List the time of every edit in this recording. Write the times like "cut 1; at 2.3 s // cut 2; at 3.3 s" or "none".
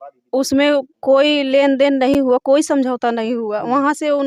none